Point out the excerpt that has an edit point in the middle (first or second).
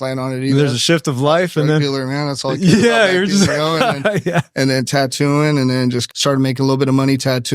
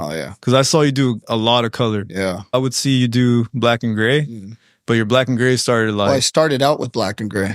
first